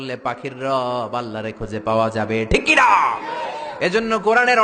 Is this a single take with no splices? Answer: yes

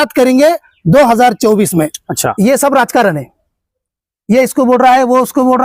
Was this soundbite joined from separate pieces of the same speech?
yes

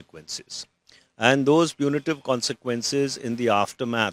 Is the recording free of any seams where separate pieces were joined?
yes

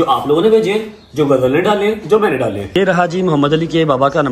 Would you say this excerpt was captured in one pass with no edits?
no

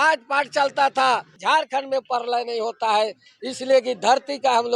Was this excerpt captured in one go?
no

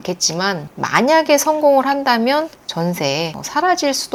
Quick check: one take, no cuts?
yes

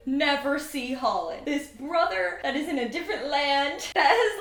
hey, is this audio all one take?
yes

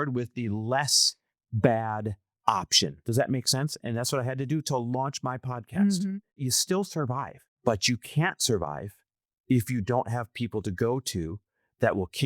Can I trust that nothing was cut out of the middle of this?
no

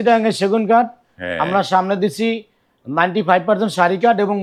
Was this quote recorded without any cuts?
yes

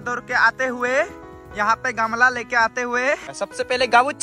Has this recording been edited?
yes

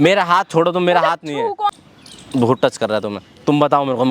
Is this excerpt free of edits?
no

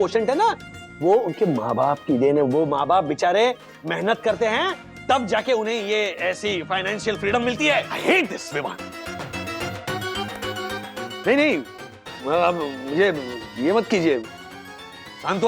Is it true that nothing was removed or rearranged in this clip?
no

